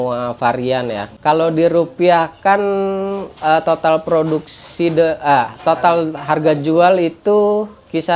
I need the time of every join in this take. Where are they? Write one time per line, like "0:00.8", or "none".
0:01.2